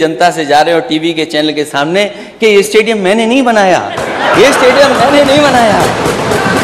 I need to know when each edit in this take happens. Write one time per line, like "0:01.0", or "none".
none